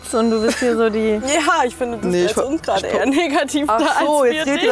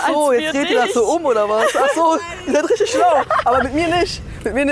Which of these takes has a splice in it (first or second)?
second